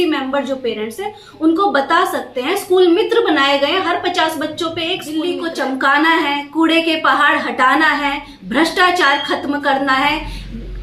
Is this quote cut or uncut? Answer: cut